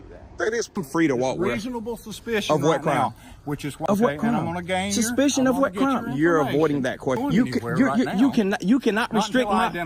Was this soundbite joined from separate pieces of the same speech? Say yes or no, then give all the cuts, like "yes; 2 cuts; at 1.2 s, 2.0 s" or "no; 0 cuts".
yes; 2 cuts; at 0.8 s, 7.2 s